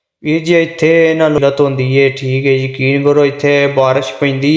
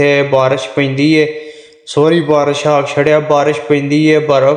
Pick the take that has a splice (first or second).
first